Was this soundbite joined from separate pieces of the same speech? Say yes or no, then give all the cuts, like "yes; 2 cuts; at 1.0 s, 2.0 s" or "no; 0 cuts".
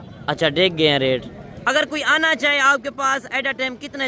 yes; 1 cut; at 1.5 s